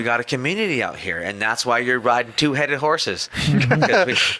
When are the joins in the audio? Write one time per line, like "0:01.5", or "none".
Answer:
none